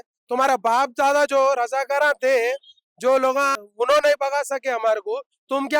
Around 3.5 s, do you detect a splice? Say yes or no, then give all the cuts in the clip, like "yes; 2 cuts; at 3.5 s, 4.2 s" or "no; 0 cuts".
yes; 1 cut; at 3.5 s